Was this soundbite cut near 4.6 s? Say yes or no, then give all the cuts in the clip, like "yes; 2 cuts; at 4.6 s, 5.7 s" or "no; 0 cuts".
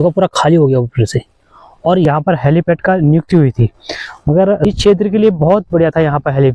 yes; 2 cuts; at 2.1 s, 4.6 s